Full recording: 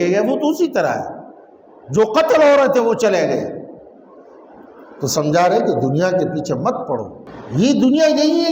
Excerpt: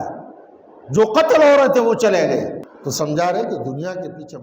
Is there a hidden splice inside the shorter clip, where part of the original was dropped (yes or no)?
yes